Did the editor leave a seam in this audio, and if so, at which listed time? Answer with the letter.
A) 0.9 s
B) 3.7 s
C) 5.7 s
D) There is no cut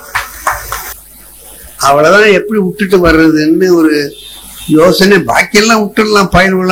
A